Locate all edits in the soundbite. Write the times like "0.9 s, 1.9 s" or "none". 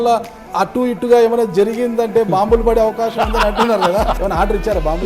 4.2 s